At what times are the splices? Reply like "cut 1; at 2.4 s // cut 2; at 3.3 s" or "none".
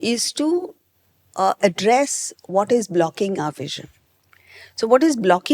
none